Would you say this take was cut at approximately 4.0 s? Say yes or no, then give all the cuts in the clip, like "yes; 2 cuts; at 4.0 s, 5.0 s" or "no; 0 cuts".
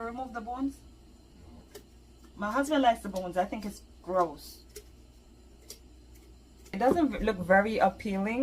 no; 1 cut; at 6.8 s